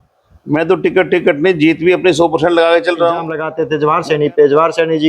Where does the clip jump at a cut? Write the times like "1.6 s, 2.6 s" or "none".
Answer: 3.6 s